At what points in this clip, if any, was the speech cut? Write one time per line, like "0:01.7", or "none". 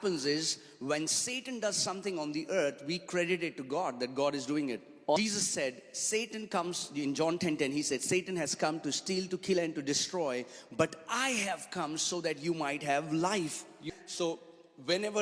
0:05.2
0:13.8